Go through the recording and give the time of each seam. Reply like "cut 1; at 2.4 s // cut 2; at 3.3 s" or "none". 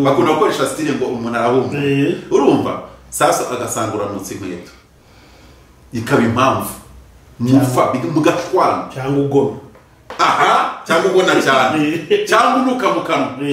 none